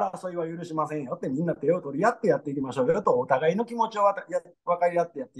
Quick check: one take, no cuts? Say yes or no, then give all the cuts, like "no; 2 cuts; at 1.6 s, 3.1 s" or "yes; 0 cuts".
yes; 0 cuts